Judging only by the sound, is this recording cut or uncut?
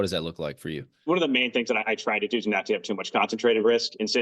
cut